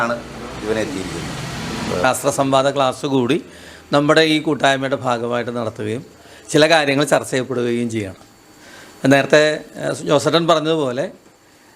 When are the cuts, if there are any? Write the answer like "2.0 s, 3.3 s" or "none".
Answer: 2.0 s